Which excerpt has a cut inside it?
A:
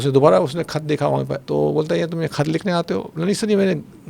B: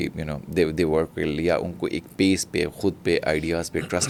A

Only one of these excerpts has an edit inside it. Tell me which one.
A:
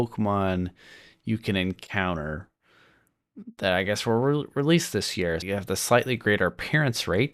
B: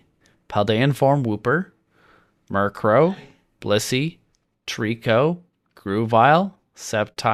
A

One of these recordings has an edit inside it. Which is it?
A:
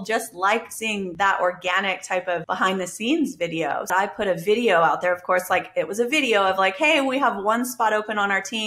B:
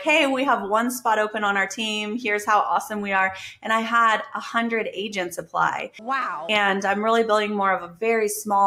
A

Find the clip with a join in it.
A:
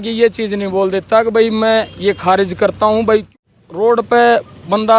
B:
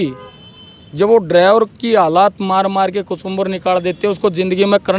A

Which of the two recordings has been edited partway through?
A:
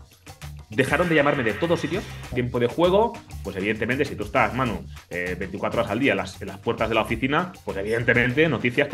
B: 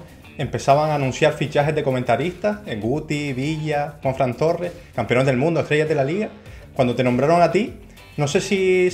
A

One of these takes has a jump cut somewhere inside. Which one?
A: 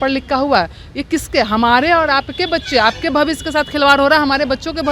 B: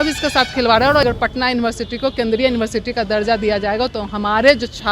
B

